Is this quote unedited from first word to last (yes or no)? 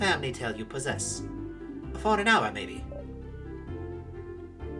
yes